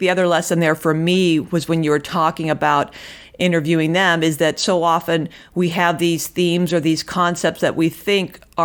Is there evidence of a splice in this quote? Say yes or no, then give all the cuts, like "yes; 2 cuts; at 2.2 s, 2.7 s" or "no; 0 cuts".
no; 0 cuts